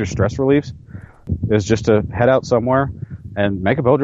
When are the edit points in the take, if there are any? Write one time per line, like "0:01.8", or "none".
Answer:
0:01.3